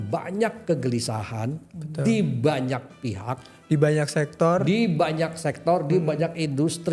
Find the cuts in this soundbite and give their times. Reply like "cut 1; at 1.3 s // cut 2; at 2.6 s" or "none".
none